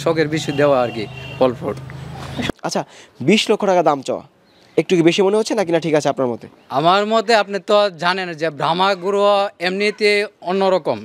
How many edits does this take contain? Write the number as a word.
one